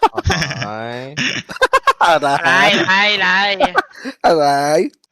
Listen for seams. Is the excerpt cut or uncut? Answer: uncut